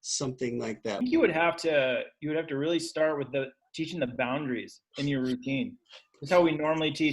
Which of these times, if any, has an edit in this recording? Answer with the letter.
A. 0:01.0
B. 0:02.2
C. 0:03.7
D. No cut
A